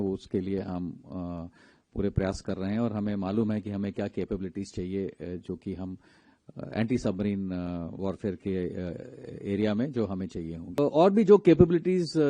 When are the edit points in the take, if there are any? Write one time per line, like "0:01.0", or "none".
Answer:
0:10.8